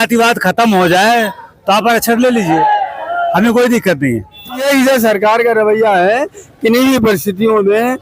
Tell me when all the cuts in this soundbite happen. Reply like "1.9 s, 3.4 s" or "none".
4.6 s